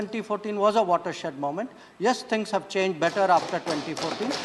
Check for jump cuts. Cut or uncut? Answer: uncut